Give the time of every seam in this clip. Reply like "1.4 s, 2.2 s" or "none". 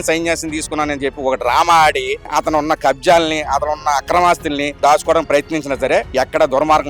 2.3 s, 4.8 s, 6.1 s